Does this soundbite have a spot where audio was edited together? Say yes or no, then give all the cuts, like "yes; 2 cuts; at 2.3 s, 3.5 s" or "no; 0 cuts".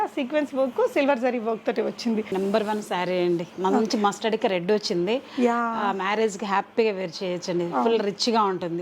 yes; 1 cut; at 2.3 s